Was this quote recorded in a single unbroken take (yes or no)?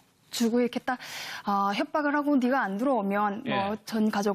no